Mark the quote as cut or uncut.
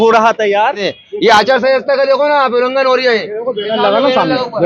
cut